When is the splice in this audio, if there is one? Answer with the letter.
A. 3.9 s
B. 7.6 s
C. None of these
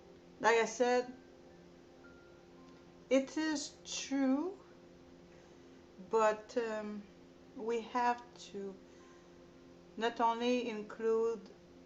B